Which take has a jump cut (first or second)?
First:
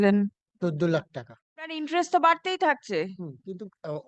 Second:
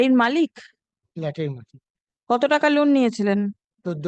first